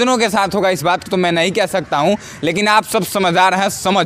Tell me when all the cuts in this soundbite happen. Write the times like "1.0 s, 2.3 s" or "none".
none